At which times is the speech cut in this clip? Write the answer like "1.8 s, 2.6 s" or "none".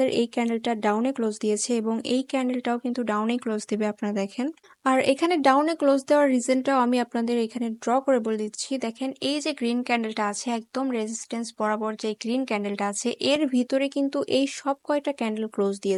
none